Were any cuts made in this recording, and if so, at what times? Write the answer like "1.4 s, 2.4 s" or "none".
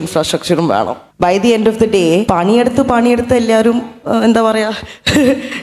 1.0 s, 2.3 s